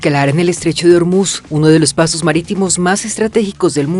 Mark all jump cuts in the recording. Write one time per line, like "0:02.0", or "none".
none